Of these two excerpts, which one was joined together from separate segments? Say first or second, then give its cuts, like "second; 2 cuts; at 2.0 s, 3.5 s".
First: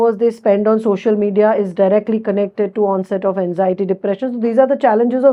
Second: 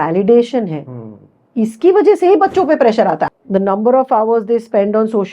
second; 1 cut; at 3.2 s